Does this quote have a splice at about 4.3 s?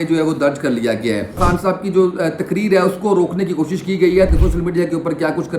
yes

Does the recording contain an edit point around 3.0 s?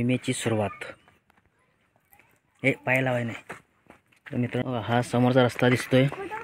no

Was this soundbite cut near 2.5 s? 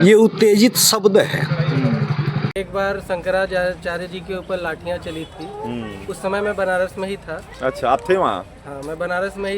yes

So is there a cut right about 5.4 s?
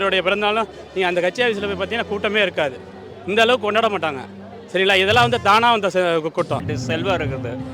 no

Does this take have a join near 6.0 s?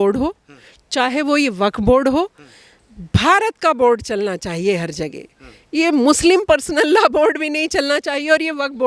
no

